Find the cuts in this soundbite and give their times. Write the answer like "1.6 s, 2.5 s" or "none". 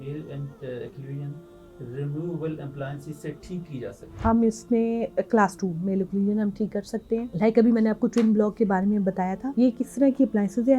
4.1 s, 7.3 s, 9.4 s